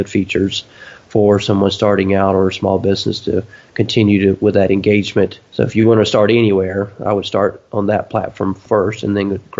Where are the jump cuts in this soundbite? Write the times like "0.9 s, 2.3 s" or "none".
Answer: 5.4 s, 7.6 s, 8.6 s